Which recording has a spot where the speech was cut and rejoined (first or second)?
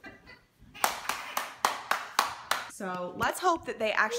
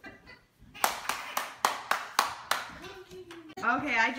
second